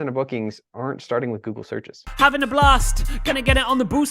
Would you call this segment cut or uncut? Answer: cut